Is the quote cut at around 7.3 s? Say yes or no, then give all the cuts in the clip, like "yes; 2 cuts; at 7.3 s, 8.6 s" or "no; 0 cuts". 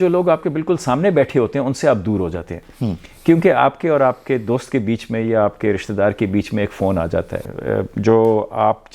yes; 1 cut; at 7.3 s